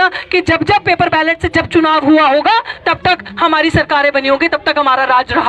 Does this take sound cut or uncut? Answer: uncut